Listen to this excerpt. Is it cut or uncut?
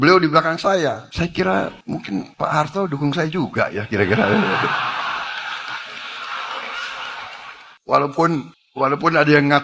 cut